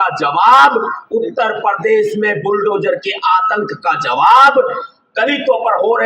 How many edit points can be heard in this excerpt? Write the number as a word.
zero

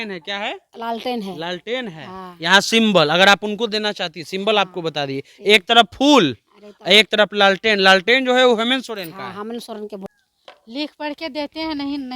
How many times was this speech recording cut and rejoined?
one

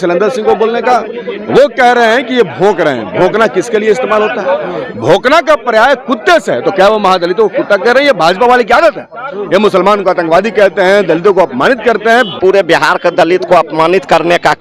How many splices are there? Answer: one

